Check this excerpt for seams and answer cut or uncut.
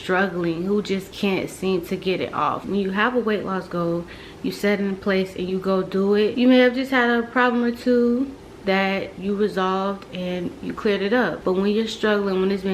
uncut